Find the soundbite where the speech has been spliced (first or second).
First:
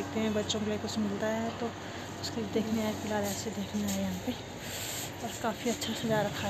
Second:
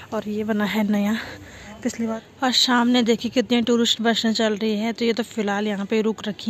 second